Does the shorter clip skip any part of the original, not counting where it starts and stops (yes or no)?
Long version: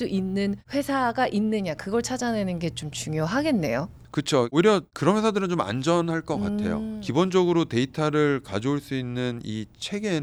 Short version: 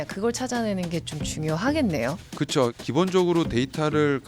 yes